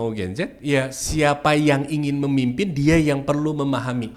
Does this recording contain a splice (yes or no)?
no